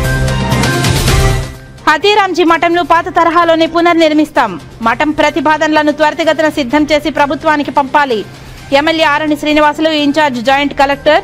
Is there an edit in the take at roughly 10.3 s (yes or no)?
no